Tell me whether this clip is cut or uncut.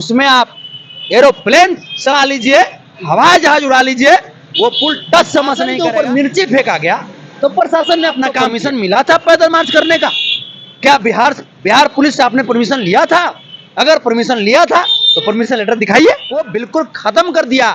cut